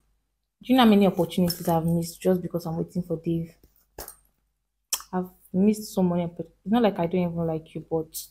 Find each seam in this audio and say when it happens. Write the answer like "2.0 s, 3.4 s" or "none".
none